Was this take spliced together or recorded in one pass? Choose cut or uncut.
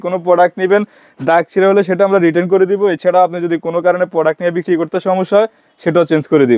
uncut